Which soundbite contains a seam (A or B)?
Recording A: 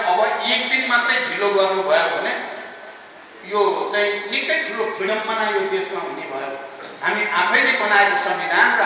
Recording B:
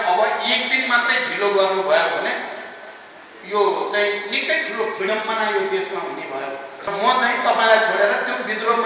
B